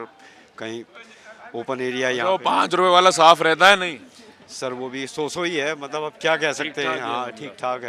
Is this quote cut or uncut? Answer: uncut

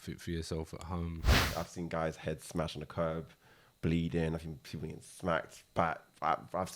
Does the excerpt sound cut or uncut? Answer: cut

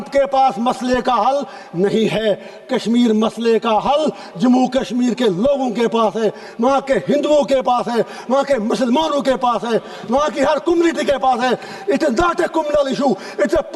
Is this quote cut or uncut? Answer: uncut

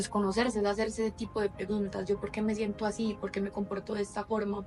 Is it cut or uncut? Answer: uncut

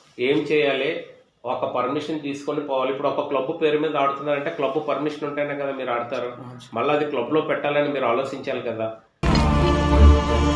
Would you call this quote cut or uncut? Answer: uncut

